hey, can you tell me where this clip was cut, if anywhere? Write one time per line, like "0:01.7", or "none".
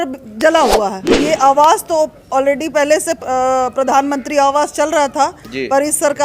0:01.0